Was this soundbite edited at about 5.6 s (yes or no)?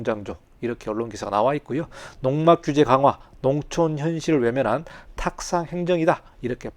no